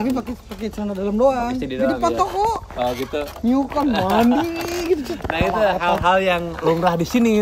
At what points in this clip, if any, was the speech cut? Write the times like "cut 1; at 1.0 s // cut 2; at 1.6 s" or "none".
none